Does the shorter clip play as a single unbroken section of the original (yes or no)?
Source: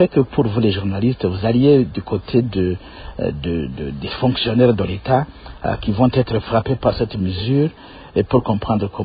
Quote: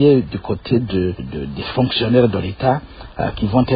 no